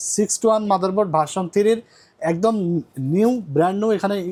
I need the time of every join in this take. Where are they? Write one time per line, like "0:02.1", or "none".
none